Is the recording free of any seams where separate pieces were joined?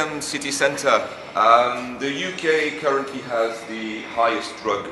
no; 1 cut; at 1.6 s

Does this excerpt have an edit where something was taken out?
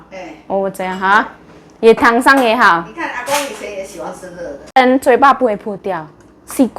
yes; 1 cut; at 4.7 s

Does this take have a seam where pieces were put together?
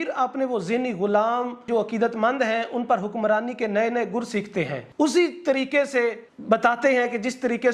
no; 0 cuts

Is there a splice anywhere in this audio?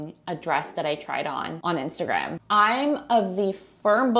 yes; 2 cuts; at 1.5 s, 2.4 s

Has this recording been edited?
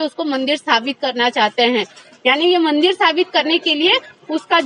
no; 0 cuts

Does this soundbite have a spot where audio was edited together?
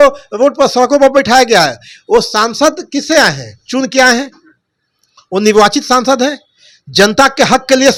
no; 0 cuts

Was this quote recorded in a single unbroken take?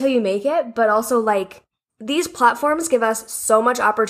yes; 0 cuts

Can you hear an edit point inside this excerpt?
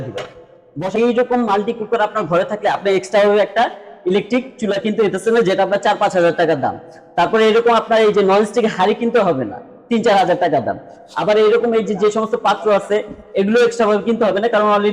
yes; 1 cut; at 1.0 s

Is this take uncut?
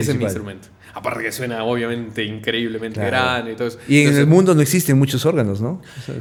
yes; 0 cuts

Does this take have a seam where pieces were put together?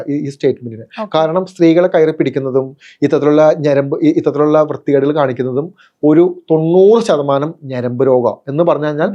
no; 0 cuts

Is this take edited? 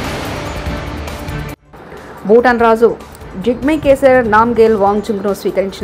yes; 1 cut; at 1.6 s

